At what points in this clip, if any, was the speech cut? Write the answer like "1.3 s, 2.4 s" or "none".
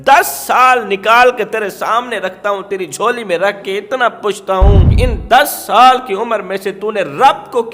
4.9 s